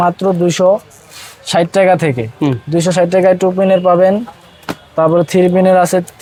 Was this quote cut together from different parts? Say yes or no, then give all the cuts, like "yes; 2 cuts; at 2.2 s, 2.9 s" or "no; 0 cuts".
no; 0 cuts